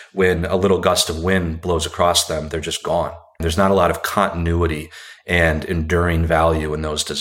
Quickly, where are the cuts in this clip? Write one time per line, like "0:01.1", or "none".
0:03.4